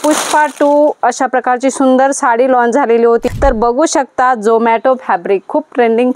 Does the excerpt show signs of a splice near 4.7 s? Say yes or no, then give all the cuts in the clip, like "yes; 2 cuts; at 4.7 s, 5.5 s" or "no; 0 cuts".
no; 1 cut; at 3.2 s